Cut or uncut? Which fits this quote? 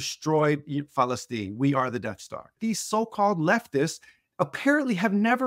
cut